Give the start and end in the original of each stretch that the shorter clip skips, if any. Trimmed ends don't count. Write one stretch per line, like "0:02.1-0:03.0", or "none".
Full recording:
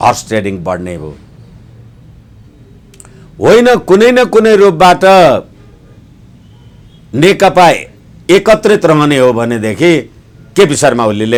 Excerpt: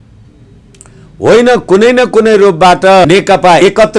0:05.2-0:07.7